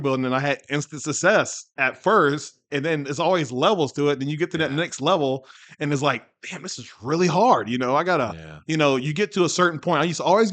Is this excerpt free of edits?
yes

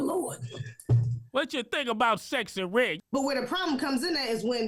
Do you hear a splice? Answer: yes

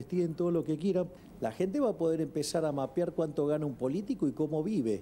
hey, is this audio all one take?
no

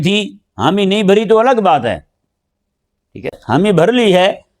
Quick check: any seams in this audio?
yes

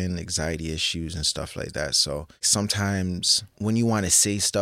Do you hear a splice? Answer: yes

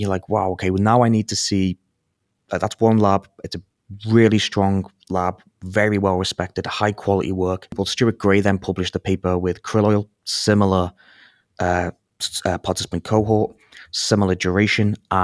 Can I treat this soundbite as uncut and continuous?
no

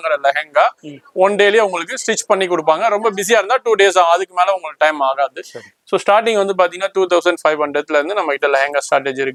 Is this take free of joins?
yes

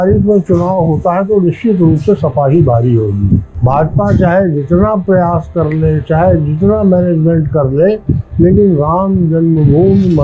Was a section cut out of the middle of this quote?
yes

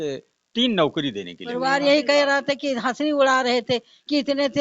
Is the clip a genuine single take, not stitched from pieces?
no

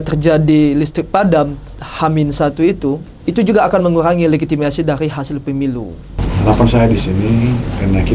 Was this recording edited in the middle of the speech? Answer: yes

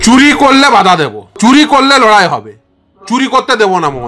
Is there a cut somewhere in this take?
yes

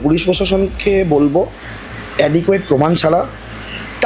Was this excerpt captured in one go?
yes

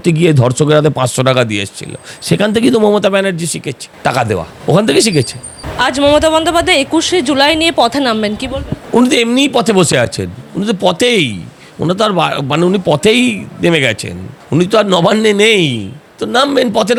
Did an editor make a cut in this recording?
no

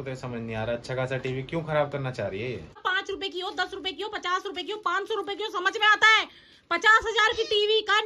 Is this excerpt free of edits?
no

